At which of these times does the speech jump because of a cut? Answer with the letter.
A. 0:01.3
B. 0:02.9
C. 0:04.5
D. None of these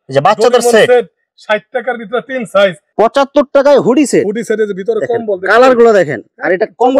B